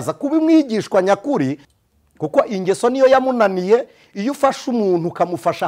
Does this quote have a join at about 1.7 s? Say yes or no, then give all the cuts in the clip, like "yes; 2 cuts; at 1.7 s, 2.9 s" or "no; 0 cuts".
yes; 1 cut; at 1.7 s